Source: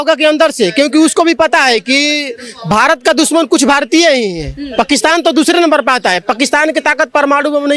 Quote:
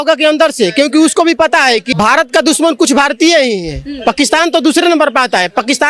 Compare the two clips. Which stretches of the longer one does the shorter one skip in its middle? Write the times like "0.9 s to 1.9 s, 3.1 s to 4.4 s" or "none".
1.9 s to 2.6 s